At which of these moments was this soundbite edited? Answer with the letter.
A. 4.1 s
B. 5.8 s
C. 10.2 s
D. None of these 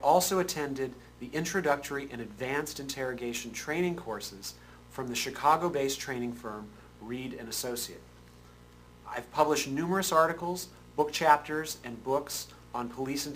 C